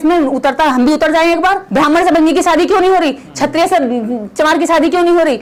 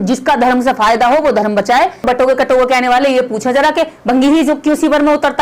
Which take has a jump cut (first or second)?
second